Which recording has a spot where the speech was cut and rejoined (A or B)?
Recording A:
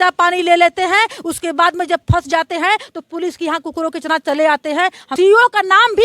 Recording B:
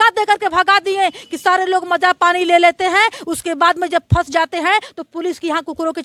A